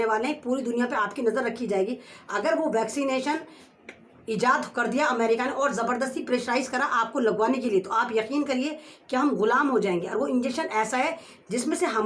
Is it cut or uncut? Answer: uncut